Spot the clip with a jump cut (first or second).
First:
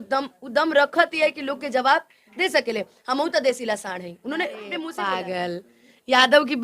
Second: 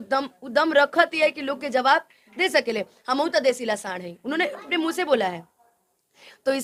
first